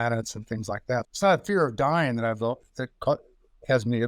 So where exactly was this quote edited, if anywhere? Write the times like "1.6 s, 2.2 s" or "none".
1.1 s